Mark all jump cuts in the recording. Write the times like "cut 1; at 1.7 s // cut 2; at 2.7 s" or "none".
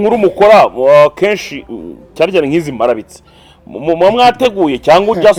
none